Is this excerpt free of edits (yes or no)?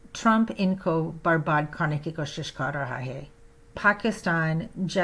no